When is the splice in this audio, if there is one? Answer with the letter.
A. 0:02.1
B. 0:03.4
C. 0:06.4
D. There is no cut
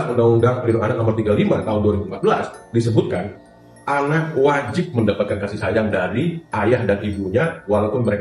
D